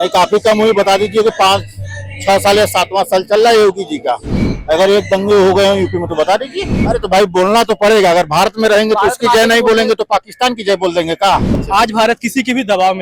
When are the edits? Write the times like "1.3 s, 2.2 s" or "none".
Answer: 6.8 s, 11.5 s